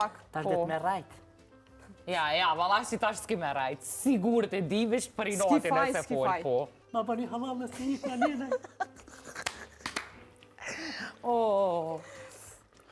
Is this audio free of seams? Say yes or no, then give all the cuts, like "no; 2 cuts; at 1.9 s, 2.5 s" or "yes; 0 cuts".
no; 1 cut; at 6.8 s